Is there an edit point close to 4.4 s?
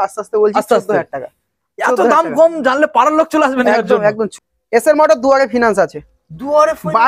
yes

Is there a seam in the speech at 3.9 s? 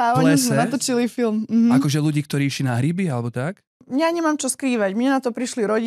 yes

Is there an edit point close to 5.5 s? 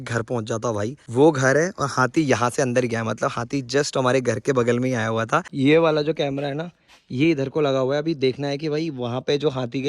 yes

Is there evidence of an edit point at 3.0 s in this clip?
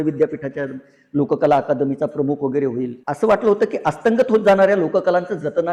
yes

